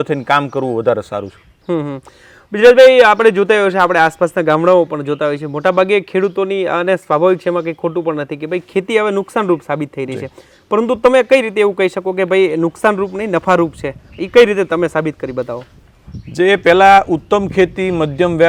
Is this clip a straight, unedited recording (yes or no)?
yes